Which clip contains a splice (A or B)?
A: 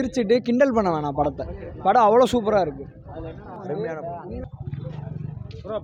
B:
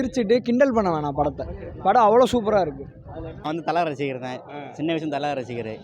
B